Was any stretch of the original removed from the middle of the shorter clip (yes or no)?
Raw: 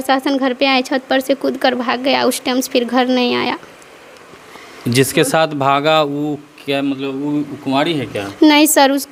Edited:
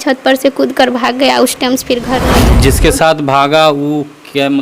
yes